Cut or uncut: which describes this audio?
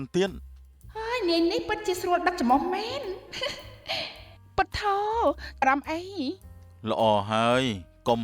cut